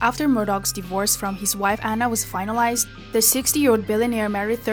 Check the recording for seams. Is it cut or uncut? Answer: uncut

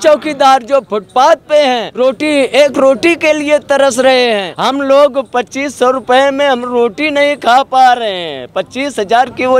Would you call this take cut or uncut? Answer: cut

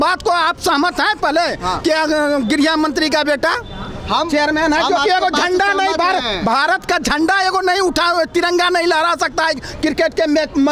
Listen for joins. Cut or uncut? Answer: uncut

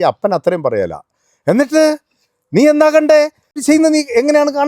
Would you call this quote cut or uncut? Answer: cut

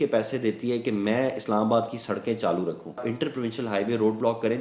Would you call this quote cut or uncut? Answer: cut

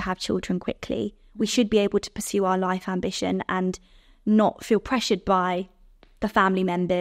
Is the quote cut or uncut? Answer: uncut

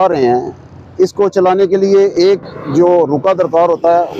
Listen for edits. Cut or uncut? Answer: uncut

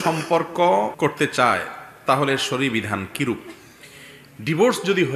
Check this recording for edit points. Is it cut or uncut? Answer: uncut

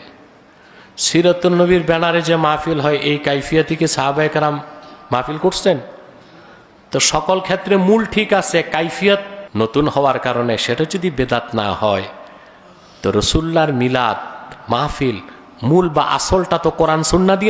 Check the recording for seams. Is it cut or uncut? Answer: cut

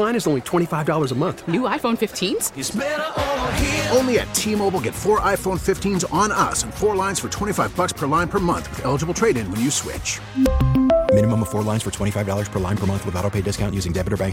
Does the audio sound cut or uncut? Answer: uncut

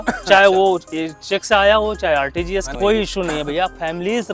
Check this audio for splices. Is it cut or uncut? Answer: cut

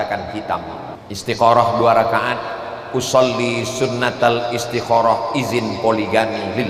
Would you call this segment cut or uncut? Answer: cut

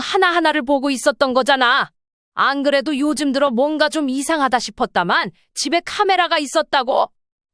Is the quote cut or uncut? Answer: uncut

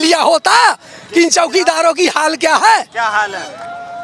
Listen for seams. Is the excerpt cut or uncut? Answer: uncut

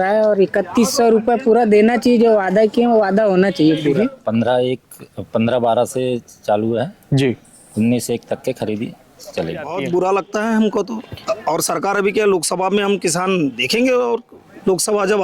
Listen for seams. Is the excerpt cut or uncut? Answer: cut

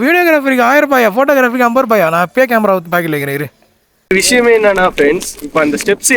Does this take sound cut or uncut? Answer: cut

